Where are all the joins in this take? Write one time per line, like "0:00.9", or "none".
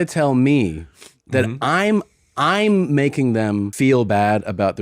0:03.7